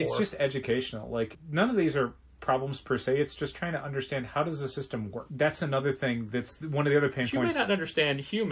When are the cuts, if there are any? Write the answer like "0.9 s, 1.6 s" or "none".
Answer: 1.4 s, 5.2 s